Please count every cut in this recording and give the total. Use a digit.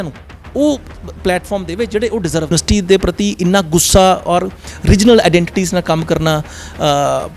1